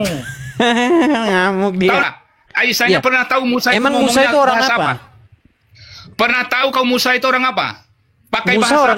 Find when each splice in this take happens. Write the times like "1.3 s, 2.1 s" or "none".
2.0 s